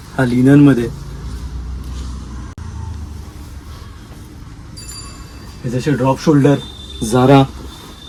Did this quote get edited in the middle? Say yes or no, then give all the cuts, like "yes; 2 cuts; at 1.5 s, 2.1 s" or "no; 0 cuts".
no; 0 cuts